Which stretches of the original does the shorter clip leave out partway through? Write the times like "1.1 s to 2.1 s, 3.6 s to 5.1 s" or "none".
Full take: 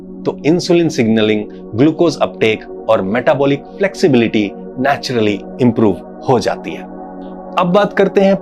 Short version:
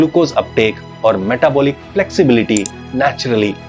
none